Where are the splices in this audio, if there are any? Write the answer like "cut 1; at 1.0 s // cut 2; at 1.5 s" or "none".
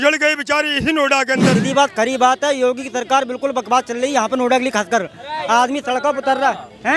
cut 1; at 1.6 s